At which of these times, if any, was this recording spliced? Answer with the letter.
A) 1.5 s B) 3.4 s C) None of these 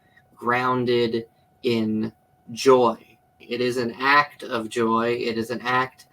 B